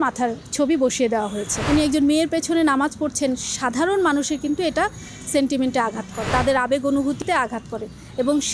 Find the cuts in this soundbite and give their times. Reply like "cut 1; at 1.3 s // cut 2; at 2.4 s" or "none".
cut 1; at 1.6 s